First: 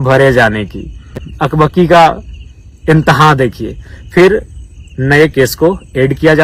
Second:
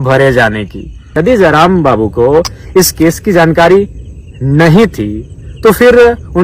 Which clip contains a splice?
second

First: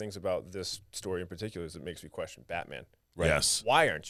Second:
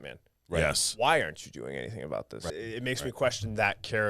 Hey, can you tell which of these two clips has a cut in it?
second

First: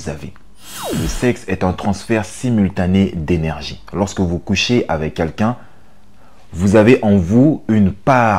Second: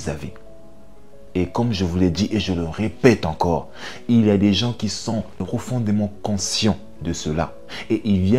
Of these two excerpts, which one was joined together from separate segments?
first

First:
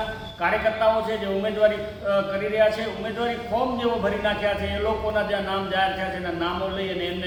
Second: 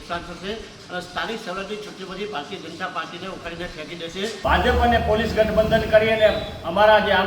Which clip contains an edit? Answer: second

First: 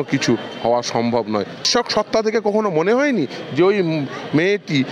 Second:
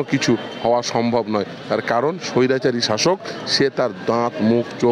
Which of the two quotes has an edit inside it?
first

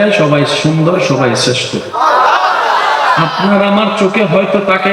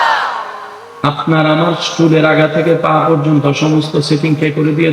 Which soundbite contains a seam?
first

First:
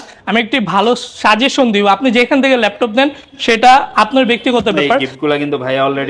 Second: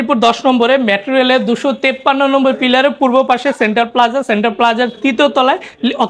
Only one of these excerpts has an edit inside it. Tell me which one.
first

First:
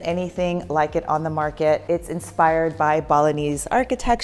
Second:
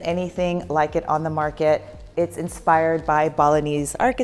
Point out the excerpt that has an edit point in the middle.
first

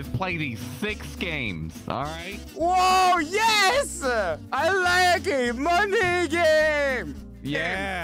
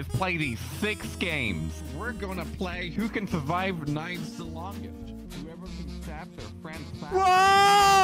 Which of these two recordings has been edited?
second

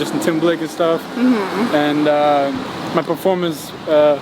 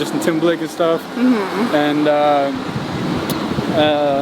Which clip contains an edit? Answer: first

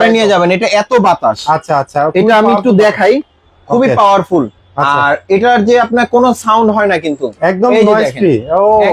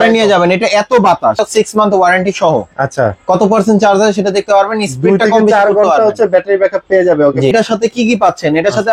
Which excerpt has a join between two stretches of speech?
second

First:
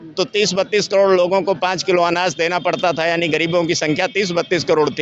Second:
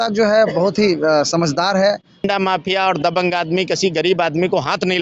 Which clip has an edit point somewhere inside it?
second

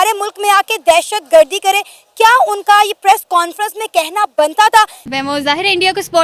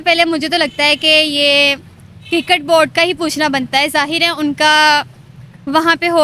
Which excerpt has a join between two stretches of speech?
first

